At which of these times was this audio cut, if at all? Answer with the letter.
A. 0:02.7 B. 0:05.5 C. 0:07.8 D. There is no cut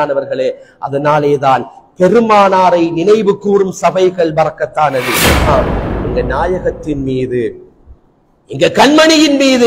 B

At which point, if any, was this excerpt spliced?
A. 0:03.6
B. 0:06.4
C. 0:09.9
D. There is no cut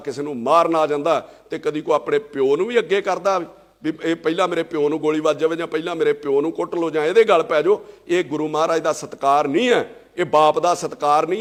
D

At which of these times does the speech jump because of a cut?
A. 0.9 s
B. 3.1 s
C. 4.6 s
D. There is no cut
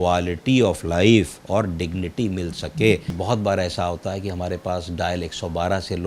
B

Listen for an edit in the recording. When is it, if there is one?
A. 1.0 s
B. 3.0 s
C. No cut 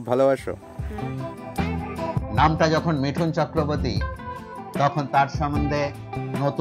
A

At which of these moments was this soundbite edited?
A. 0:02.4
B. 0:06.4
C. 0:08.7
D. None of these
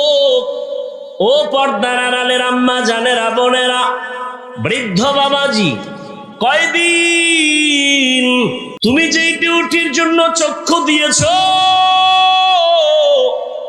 C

